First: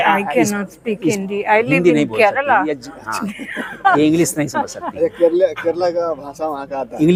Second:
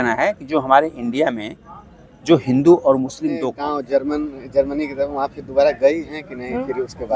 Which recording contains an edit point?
second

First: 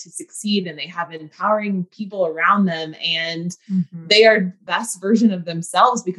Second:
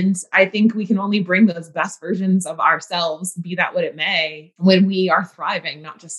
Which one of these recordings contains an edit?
first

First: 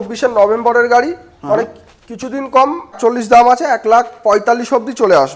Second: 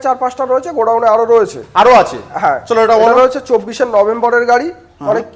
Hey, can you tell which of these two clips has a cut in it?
first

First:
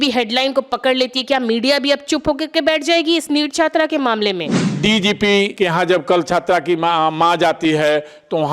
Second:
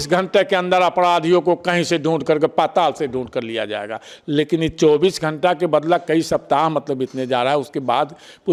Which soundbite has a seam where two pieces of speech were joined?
first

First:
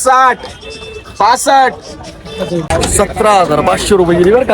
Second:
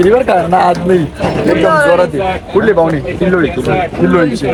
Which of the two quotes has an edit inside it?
first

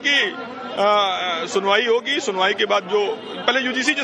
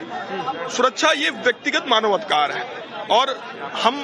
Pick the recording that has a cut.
first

